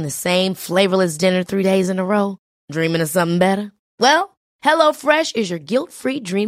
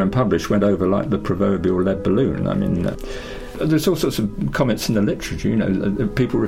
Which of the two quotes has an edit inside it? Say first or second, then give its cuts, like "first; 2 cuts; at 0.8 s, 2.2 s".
second; 1 cut; at 2.9 s